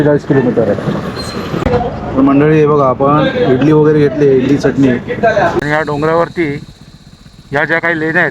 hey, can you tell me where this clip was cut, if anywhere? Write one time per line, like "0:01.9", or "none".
0:01.6
0:05.6